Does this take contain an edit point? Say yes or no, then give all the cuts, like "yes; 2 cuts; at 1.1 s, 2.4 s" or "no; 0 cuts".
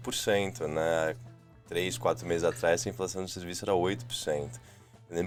no; 0 cuts